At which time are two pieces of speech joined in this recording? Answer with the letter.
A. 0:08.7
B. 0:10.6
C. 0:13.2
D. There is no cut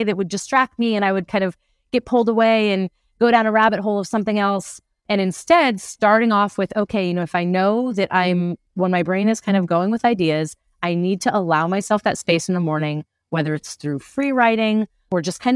D